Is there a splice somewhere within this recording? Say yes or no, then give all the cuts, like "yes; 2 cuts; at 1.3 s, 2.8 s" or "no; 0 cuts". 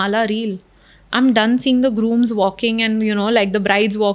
no; 0 cuts